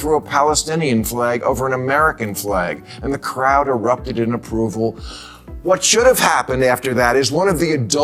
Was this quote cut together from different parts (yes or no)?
no